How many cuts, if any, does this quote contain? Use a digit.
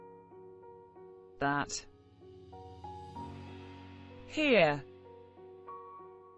3